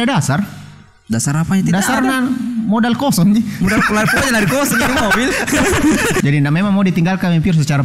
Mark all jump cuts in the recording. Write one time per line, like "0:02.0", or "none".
0:06.2

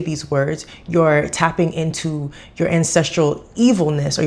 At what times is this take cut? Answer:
none

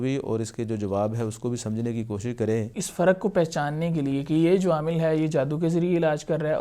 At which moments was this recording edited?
0:02.8

